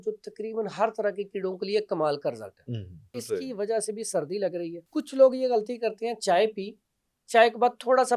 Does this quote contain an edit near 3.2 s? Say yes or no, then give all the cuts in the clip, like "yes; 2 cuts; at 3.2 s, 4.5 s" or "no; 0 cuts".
yes; 2 cuts; at 3.2 s, 4.8 s